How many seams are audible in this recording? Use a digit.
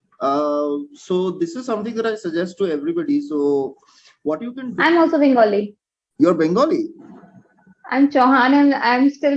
1